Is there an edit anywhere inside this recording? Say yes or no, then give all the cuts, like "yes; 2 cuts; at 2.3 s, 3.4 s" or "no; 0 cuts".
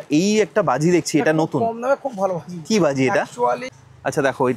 yes; 1 cut; at 3.7 s